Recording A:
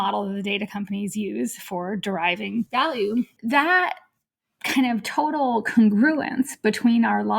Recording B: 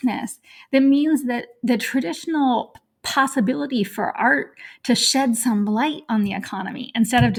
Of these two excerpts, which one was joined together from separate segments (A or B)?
A